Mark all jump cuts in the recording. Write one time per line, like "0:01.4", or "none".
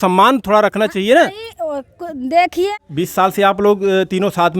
0:02.7